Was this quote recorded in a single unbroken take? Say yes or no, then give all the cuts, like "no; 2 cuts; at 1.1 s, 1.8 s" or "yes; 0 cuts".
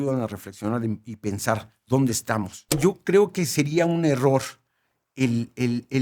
no; 1 cut; at 2.8 s